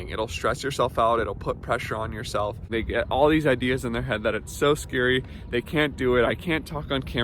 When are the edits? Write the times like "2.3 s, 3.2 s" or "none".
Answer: 2.7 s